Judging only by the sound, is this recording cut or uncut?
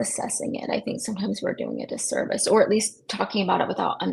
uncut